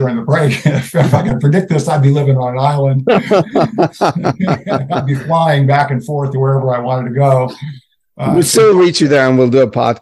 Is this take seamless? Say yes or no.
yes